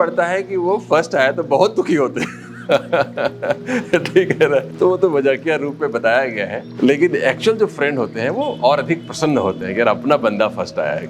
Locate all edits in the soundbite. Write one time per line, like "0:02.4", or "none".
0:04.7
0:06.6